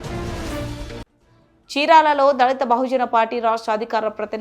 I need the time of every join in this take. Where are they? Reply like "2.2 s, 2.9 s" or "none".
1.0 s